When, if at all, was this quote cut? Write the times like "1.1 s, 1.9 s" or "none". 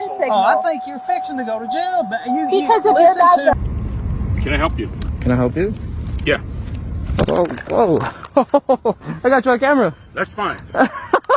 3.5 s, 7.2 s

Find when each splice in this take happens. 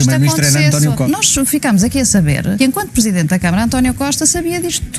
1.0 s, 2.6 s

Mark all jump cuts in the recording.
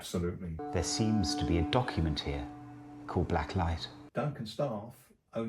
3.9 s

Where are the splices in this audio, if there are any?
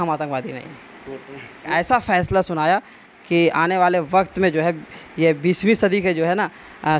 1.7 s

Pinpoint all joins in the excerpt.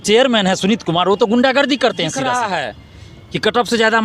2.2 s

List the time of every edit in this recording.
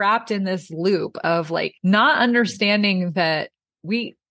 1.7 s

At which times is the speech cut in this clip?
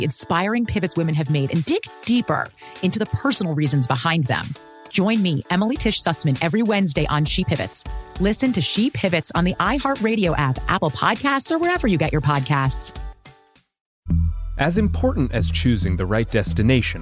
13.9 s

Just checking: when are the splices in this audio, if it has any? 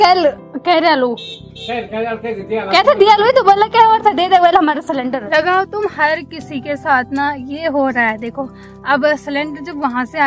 5.2 s

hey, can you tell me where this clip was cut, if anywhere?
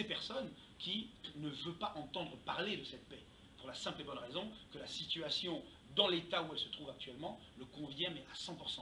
none

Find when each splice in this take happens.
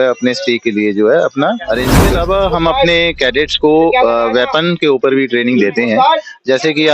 2.0 s

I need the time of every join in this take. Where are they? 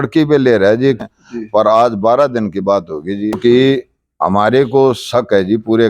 1.0 s, 3.4 s

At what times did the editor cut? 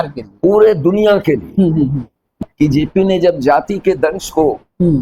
2.2 s

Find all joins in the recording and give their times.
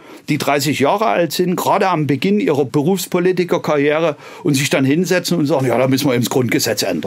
2.7 s

